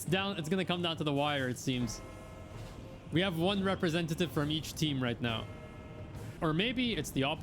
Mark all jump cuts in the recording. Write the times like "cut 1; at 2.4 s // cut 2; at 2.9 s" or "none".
cut 1; at 6.4 s